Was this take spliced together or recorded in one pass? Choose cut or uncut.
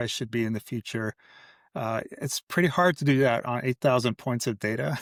uncut